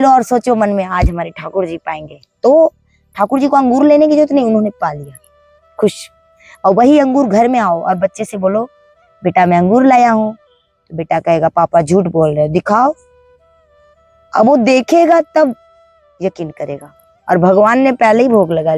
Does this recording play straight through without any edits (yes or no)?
yes